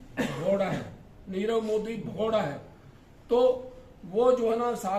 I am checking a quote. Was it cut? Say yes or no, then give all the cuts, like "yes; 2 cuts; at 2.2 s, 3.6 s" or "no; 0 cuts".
no; 0 cuts